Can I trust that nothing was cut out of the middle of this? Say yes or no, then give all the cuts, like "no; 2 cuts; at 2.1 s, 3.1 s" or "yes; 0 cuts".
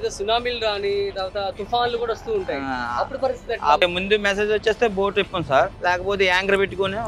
no; 2 cuts; at 3.8 s, 5.7 s